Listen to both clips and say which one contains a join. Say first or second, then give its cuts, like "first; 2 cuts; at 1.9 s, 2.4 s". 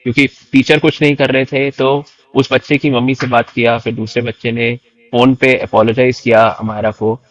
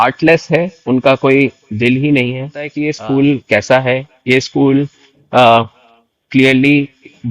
second; 1 cut; at 2.8 s